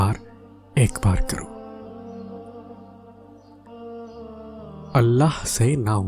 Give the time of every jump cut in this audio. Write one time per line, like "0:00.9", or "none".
0:01.5
0:04.8